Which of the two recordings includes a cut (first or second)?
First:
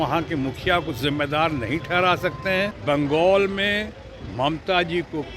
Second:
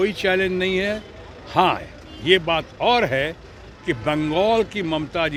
first